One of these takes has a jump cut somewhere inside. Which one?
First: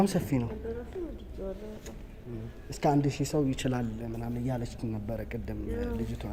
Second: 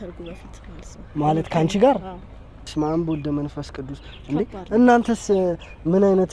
second; 1 cut; at 2.6 s

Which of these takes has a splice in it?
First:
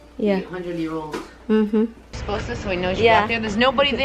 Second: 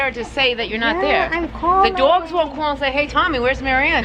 first; 1 cut; at 2.0 s

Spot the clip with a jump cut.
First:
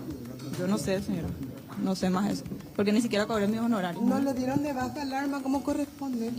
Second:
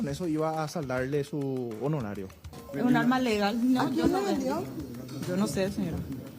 second; 1 cut; at 2.5 s

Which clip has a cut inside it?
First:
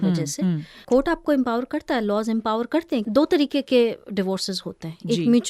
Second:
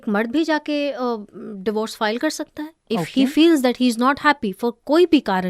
first; 2 cuts; at 0.8 s, 3.1 s

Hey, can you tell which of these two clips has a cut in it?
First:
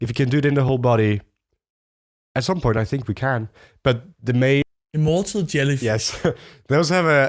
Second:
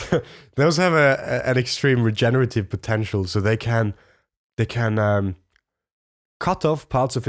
first; 1 cut; at 4.6 s

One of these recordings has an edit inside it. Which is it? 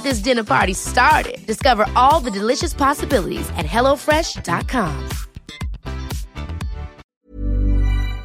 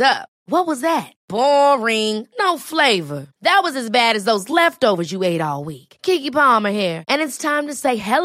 first; 1 cut; at 7.2 s

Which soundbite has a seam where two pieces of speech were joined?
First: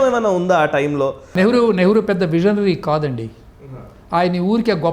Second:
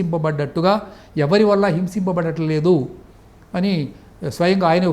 first; 1 cut; at 1.3 s

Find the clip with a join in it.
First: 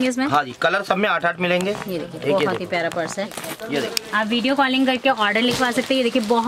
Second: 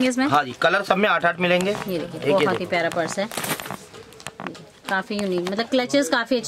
first; 1 cut; at 3.5 s

